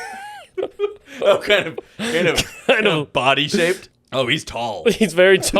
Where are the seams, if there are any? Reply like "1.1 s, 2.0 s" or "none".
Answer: 3.9 s